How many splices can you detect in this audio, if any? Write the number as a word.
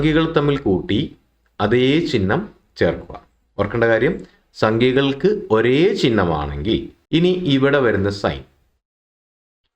one